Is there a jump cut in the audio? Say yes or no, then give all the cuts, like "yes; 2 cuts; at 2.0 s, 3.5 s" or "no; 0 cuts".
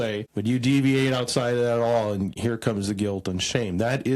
yes; 1 cut; at 2.3 s